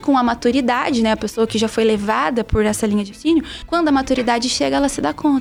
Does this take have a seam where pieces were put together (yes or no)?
no